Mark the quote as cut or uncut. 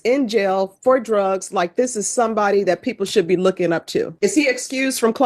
cut